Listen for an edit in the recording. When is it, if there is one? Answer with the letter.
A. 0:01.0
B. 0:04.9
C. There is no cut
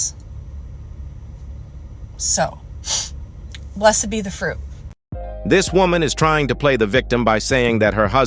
C